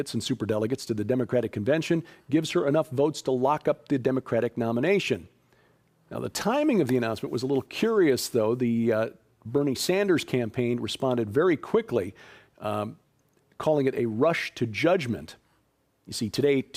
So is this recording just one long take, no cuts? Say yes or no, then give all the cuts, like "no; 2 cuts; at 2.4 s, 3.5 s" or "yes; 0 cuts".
yes; 0 cuts